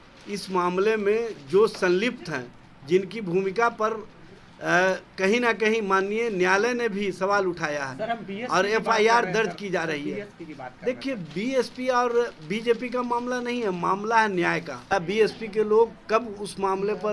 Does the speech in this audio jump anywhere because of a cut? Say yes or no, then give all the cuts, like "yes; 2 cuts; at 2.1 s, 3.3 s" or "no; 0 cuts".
yes; 1 cut; at 14.9 s